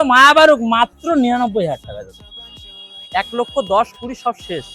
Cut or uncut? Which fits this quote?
uncut